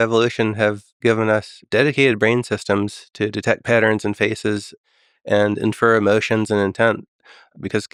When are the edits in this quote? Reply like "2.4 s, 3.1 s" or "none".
none